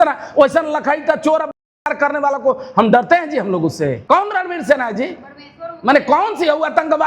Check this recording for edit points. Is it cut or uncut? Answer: cut